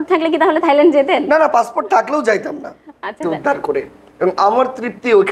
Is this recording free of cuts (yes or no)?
no